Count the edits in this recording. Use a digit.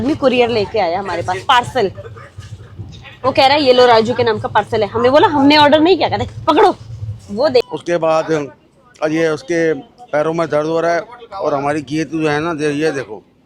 1